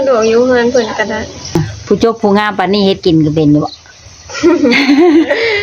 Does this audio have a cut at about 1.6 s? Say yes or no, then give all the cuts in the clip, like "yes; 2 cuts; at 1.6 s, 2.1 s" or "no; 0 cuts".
yes; 1 cut; at 1.6 s